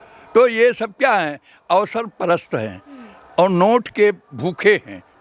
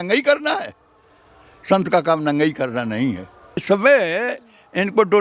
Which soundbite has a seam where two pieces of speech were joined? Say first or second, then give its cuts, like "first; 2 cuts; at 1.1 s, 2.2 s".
second; 1 cut; at 3.6 s